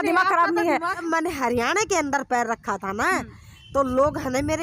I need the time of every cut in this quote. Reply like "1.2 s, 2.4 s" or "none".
1.0 s